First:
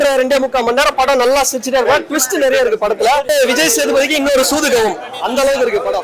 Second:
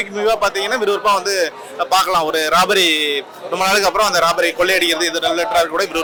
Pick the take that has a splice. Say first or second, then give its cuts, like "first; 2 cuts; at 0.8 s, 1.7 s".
first; 1 cut; at 3.3 s